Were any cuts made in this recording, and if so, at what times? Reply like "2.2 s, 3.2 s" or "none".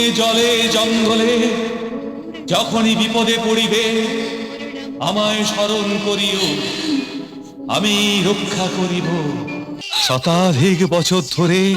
9.8 s